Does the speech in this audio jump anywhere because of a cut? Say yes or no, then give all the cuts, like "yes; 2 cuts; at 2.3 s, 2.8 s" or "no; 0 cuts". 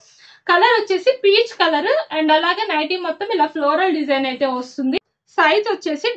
yes; 1 cut; at 5.0 s